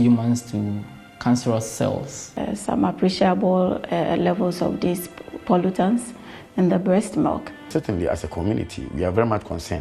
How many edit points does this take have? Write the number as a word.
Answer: two